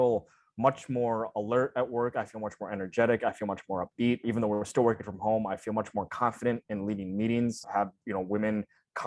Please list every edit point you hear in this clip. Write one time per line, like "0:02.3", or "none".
0:04.2
0:07.6